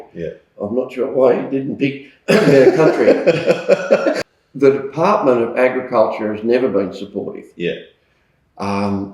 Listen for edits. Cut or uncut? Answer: cut